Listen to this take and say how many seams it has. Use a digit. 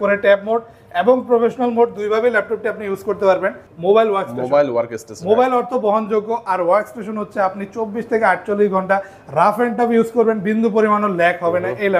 1